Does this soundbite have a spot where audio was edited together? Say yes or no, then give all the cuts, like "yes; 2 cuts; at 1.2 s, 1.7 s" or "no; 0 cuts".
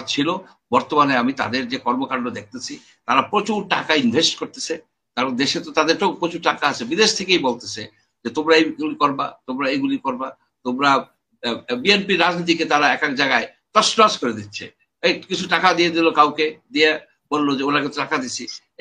no; 0 cuts